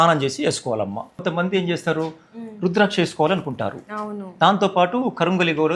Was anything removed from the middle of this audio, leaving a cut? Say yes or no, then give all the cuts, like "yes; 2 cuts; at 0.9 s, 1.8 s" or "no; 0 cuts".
yes; 1 cut; at 1.2 s